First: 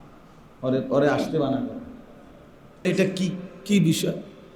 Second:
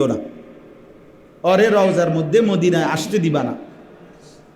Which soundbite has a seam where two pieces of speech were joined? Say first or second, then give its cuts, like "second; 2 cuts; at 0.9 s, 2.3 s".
first; 1 cut; at 2.9 s